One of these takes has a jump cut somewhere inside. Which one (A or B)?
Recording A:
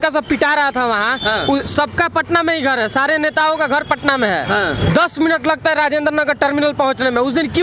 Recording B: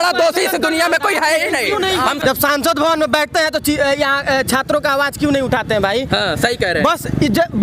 B